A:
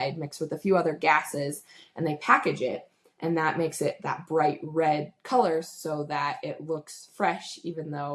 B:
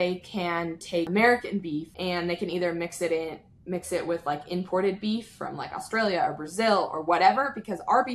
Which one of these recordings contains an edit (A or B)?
B